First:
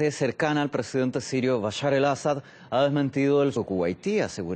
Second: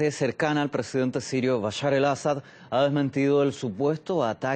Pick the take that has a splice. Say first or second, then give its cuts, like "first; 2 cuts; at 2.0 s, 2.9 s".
second; 1 cut; at 3.5 s